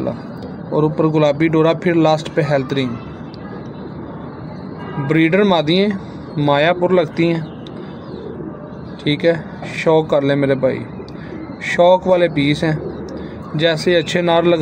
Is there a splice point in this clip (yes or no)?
no